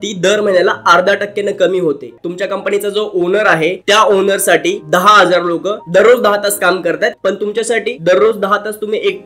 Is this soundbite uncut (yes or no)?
no